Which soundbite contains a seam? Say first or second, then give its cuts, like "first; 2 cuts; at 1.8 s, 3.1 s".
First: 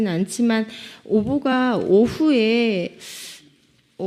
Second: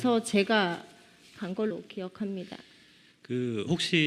second; 1 cut; at 3.1 s